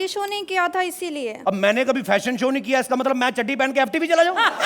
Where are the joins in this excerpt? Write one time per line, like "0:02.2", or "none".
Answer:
0:01.3